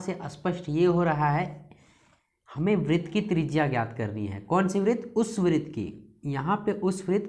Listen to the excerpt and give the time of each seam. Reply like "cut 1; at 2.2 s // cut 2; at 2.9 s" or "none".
none

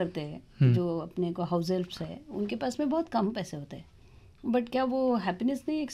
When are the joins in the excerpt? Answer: none

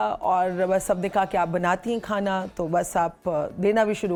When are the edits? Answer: none

